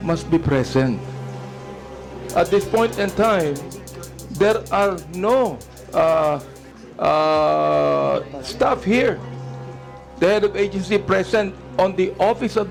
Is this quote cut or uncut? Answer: uncut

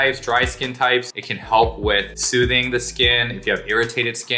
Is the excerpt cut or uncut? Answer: cut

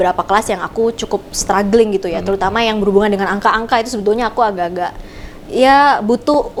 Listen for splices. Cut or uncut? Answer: uncut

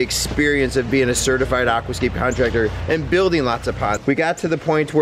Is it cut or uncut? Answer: cut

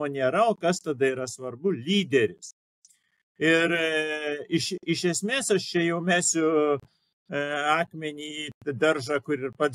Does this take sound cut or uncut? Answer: uncut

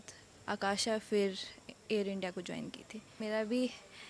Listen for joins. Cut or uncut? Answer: cut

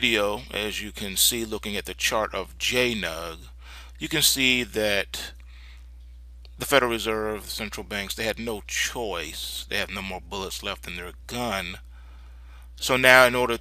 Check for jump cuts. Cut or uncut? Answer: cut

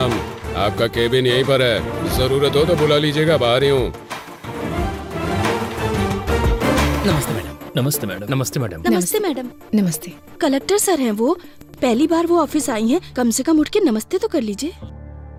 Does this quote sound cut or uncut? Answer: uncut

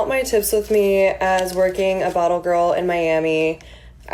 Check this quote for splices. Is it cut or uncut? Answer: uncut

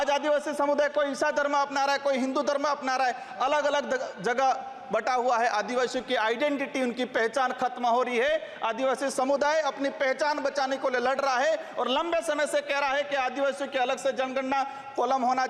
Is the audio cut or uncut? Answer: uncut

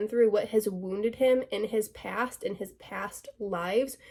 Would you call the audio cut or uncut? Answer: uncut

